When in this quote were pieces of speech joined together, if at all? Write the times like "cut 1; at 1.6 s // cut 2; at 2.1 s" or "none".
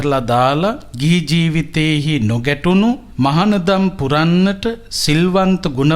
cut 1; at 0.9 s // cut 2; at 3.1 s